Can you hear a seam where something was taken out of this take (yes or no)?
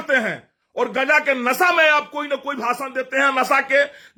no